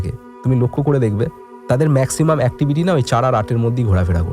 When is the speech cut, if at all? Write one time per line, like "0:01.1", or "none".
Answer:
none